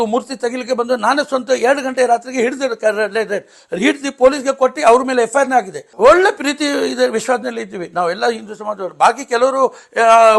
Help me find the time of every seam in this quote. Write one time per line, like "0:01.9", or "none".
0:05.8